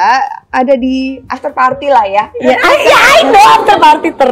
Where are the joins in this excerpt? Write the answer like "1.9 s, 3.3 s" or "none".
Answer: 1.2 s